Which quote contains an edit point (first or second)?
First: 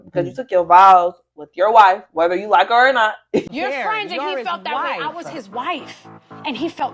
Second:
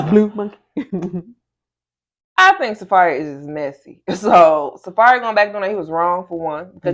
first